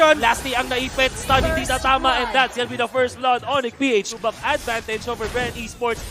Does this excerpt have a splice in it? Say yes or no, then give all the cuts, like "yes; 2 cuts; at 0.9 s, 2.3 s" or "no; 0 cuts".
yes; 1 cut; at 4.1 s